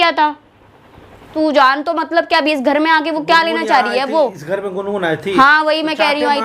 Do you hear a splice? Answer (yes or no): yes